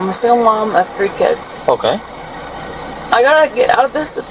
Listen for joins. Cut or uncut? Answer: uncut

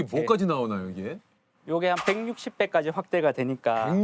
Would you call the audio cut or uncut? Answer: uncut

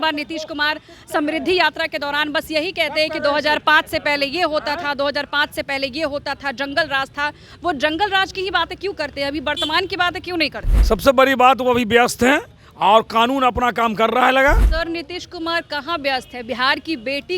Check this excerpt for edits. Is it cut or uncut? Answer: cut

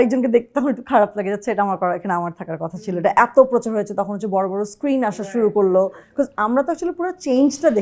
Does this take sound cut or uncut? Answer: uncut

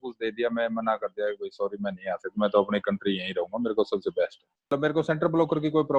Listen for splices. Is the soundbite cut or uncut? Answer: cut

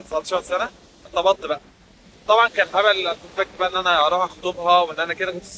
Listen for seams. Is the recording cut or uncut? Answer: cut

